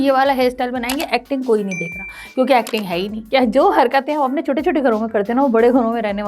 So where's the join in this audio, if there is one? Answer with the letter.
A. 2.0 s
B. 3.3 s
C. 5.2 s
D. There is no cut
B